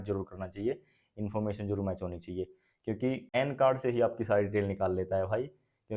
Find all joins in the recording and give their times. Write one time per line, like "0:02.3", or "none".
0:03.4